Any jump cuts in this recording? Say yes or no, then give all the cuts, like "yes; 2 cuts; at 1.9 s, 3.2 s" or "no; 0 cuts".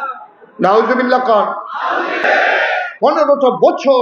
yes; 1 cut; at 2.2 s